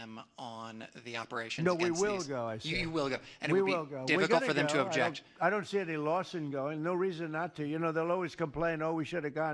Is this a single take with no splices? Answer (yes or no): no